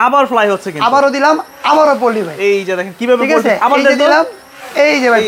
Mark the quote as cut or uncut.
uncut